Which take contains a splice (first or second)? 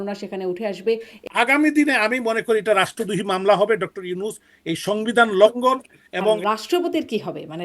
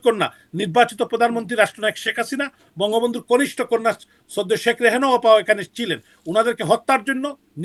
first